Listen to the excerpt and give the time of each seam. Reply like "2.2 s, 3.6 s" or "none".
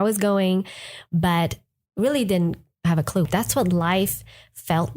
3.3 s